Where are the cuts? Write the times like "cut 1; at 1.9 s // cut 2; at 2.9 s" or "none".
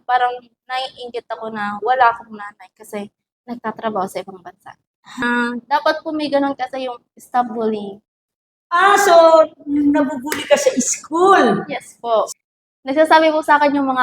cut 1; at 5.2 s // cut 2; at 12.3 s